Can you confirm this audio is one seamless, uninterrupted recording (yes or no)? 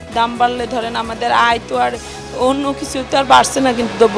yes